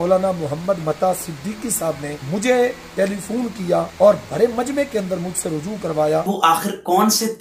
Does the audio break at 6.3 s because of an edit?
yes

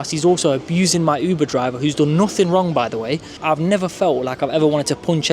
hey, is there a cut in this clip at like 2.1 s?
no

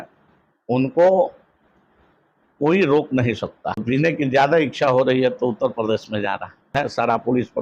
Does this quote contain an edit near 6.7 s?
yes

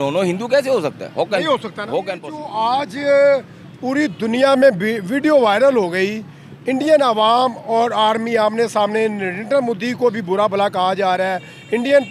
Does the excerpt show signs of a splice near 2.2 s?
yes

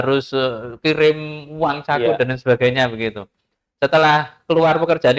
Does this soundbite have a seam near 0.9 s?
no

